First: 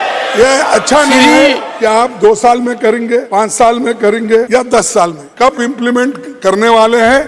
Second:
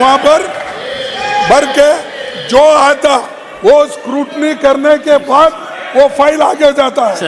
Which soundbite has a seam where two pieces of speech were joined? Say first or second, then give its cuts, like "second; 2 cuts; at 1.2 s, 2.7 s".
first; 4 cuts; at 1.7 s, 3.3 s, 4.5 s, 5.2 s